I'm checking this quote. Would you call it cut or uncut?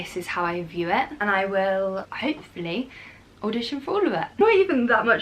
cut